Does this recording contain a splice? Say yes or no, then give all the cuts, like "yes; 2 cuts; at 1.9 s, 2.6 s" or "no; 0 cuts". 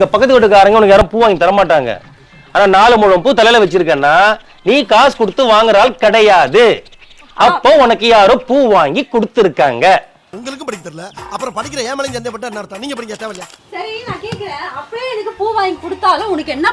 no; 0 cuts